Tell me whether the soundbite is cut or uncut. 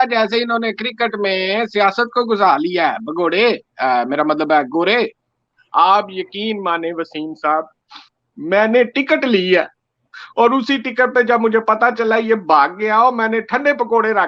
cut